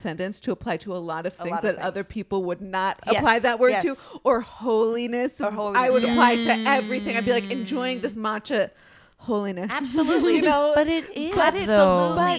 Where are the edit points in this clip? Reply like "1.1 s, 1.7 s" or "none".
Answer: none